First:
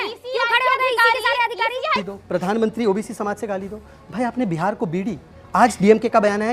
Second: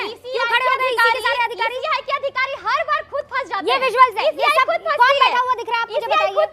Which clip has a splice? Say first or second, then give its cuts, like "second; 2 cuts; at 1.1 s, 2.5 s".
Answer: first; 1 cut; at 2.0 s